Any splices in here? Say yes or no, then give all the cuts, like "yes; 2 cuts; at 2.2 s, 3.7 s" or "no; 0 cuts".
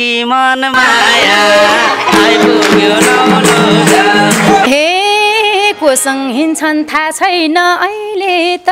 yes; 1 cut; at 4.7 s